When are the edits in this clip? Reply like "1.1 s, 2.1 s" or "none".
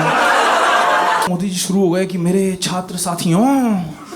1.3 s